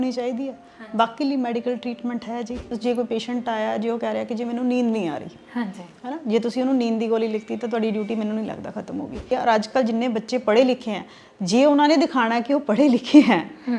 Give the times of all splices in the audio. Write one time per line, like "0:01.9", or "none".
0:02.7
0:09.3